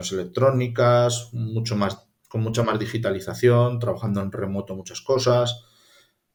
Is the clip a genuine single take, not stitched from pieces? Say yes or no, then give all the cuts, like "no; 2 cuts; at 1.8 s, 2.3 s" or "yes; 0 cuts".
yes; 0 cuts